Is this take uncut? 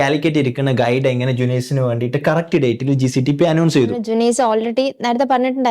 no; 1 cut; at 4.0 s

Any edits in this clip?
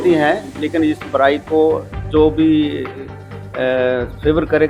no; 0 cuts

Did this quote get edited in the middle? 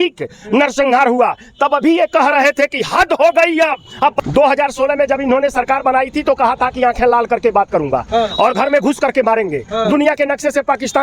yes; 1 cut; at 4.1 s

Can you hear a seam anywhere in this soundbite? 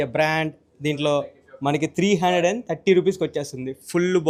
no; 0 cuts

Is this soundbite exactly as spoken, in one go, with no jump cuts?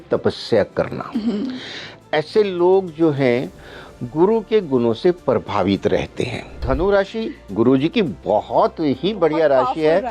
no; 1 cut; at 6.5 s

